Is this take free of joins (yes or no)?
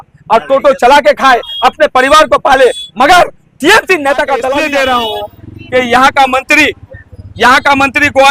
no